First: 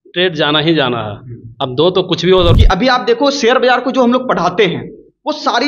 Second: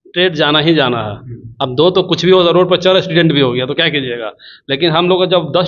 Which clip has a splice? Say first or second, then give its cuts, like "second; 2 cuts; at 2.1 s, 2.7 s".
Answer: first; 1 cut; at 2.5 s